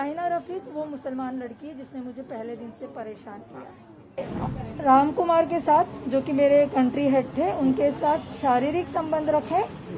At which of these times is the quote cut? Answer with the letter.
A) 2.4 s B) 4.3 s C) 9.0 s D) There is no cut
B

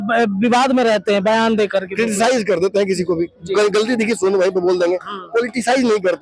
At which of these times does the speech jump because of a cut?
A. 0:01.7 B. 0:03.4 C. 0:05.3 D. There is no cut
D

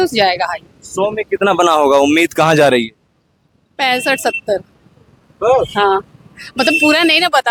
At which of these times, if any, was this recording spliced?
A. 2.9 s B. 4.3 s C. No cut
C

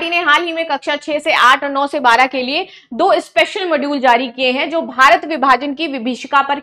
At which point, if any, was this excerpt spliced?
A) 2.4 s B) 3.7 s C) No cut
C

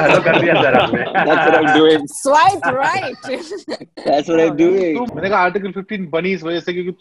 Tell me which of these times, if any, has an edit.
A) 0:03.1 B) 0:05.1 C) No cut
B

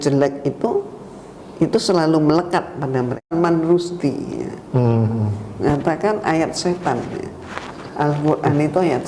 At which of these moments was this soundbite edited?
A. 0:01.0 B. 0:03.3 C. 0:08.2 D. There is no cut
B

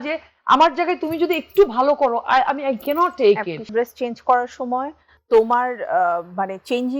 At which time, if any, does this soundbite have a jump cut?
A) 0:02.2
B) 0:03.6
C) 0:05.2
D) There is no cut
B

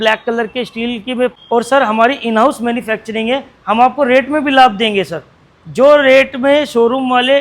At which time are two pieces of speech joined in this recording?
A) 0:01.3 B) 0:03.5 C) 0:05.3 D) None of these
A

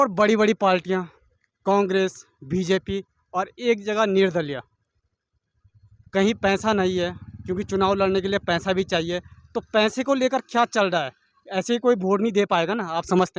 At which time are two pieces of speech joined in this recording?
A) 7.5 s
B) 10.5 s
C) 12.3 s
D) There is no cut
D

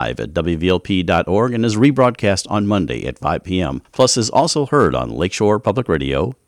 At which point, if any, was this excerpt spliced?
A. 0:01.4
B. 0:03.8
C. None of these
B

